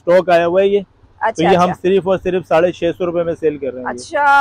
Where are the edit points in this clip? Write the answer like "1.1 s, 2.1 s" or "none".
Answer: none